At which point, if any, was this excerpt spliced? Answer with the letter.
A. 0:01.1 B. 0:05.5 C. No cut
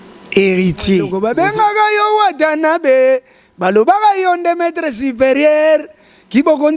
A